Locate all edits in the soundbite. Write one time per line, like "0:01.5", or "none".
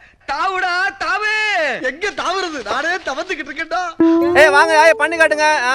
0:04.3

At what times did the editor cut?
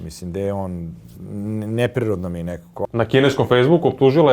0:02.8

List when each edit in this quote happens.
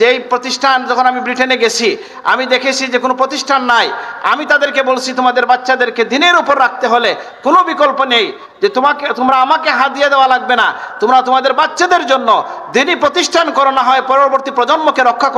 none

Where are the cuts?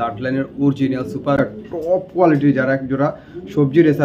0:01.4

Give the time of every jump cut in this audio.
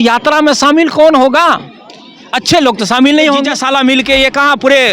0:03.6

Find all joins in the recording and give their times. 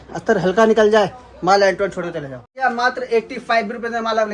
0:02.6

